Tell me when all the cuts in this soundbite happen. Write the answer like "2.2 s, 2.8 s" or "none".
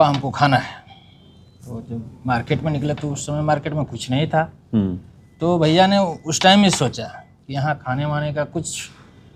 none